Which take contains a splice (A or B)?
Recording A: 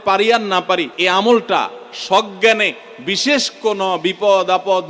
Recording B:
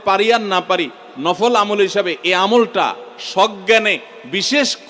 A